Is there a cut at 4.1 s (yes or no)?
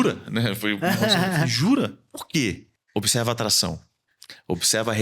no